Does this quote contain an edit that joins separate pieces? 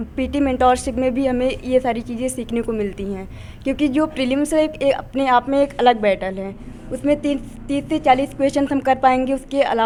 no; 0 cuts

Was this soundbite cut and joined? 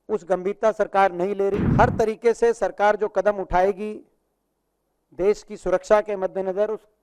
yes; 1 cut; at 1.6 s

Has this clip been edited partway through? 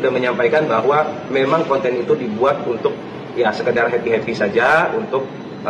no; 0 cuts

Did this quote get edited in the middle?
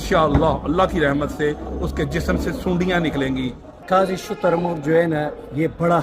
yes; 1 cut; at 3.6 s

